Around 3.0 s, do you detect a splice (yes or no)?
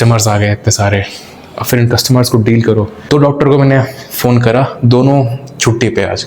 yes